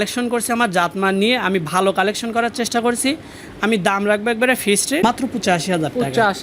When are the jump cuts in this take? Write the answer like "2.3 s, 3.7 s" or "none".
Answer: 5.0 s